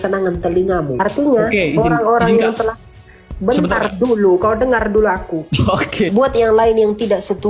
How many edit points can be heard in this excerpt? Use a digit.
2